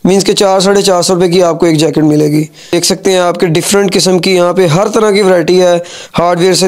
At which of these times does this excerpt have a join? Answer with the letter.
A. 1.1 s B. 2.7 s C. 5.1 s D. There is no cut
B